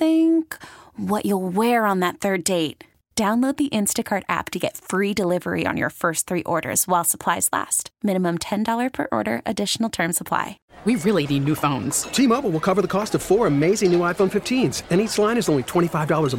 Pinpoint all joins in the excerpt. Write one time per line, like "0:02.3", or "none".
0:10.6